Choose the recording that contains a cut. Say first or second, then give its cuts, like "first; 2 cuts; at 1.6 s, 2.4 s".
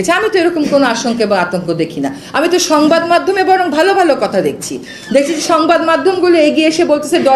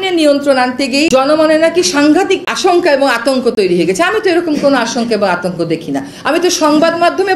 second; 2 cuts; at 1.1 s, 2.5 s